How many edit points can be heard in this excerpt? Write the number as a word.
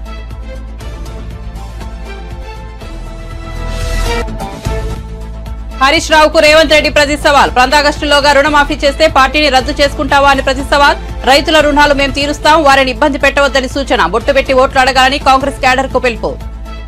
one